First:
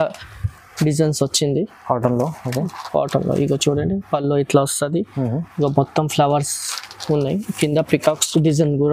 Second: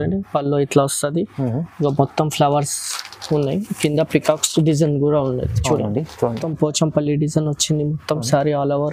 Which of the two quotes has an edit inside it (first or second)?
second